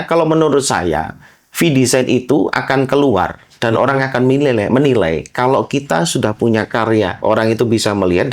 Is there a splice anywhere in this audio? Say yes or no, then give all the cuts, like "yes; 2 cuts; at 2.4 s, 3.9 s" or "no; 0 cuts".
yes; 1 cut; at 7.1 s